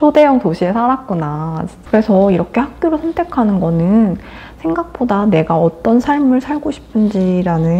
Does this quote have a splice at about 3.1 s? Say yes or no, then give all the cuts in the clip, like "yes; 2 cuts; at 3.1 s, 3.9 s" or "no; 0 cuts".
no; 1 cut; at 1.8 s